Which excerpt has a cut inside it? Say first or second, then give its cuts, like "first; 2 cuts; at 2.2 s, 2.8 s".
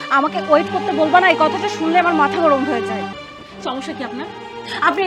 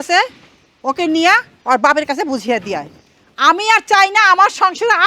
first; 1 cut; at 3.2 s